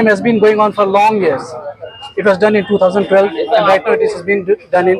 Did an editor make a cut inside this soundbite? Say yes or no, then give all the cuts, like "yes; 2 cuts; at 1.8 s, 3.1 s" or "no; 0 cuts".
no; 0 cuts